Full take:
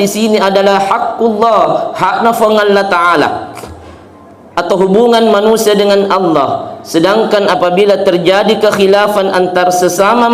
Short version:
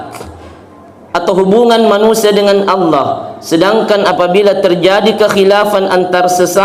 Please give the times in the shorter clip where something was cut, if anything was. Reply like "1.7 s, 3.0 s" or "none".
none

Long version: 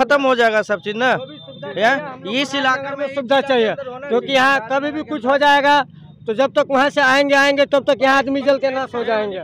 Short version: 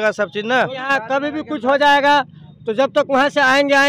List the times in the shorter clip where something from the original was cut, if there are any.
0.9 s

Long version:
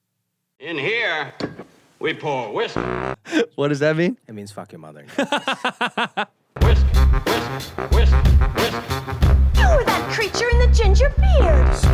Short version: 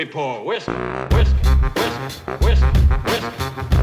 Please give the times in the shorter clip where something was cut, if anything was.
1.0 s

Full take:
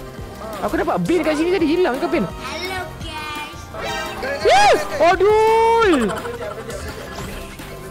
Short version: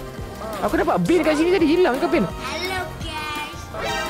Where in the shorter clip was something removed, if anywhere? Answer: none

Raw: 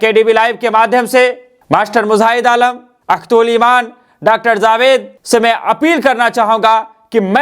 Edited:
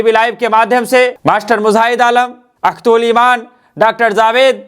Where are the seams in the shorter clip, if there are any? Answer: 1.2 s

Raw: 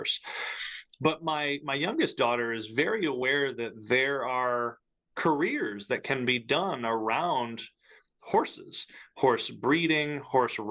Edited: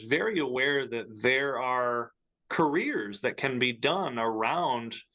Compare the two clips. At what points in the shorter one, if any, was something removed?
none

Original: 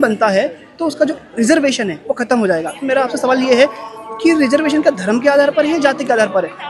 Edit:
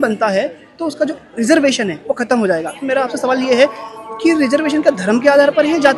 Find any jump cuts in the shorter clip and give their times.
none

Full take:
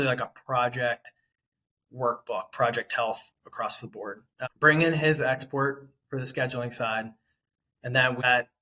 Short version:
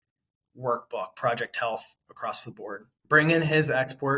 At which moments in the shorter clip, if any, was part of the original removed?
3.0 s

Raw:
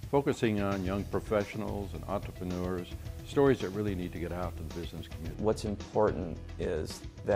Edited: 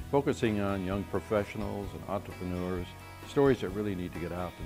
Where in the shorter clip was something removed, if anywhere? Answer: none

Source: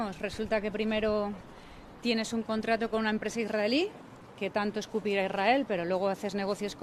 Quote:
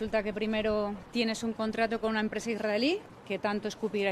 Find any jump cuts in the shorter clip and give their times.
1.0 s, 3.1 s

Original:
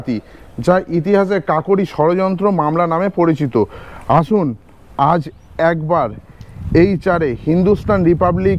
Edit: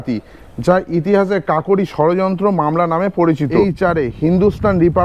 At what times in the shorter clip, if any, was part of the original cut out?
3.6 s

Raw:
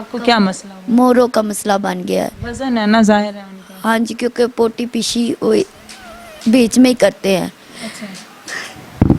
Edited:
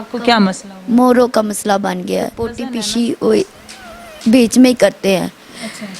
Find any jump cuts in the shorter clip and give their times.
2.5 s

